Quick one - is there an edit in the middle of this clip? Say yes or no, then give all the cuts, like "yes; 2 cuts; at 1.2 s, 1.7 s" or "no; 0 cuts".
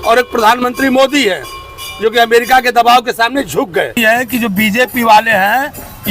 yes; 1 cut; at 3.9 s